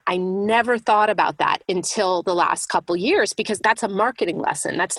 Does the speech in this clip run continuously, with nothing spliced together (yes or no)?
no